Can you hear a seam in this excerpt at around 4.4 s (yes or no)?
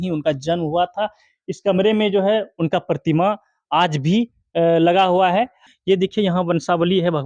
no